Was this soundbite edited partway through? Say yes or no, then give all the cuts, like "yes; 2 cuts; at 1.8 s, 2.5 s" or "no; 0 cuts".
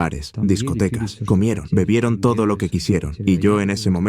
yes; 1 cut; at 3.1 s